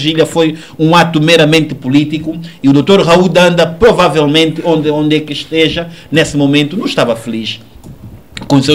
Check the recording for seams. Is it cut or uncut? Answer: uncut